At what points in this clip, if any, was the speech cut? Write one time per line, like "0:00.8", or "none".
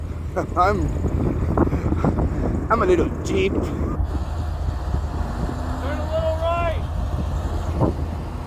0:03.9